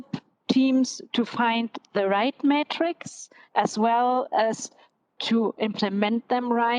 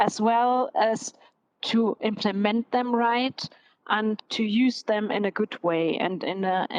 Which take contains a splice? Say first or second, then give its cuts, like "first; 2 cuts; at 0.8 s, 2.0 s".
second; 1 cut; at 4.2 s